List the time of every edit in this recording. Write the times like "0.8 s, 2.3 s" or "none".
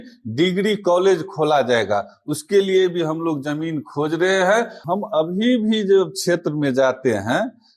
4.8 s